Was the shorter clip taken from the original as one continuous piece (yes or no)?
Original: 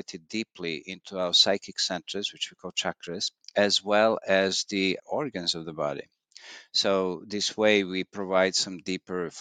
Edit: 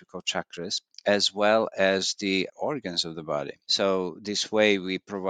no